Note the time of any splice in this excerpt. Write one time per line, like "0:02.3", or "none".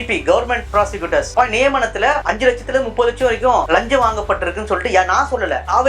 0:01.3